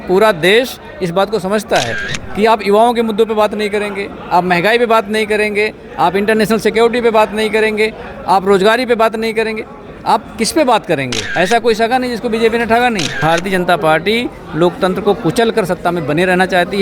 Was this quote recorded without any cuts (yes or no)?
no